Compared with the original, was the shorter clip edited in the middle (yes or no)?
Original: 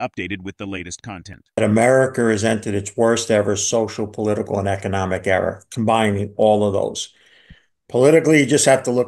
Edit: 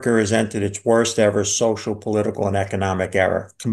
no